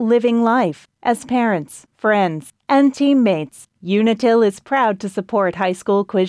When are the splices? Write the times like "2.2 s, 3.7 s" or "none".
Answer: none